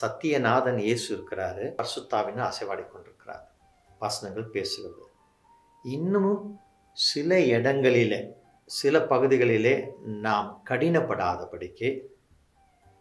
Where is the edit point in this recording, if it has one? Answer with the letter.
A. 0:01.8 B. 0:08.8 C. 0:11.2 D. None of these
A